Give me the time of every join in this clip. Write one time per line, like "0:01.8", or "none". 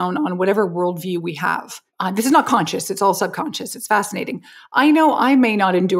0:01.8